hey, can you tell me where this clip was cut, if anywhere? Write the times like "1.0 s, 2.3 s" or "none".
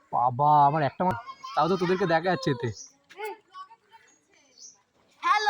1.2 s